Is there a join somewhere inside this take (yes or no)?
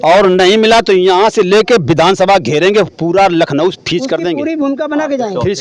no